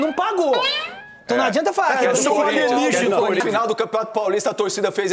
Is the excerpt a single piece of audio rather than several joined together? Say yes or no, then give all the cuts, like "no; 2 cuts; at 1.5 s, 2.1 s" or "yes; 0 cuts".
no; 1 cut; at 3.4 s